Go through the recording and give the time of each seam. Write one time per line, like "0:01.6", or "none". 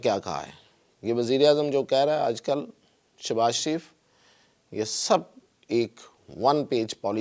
none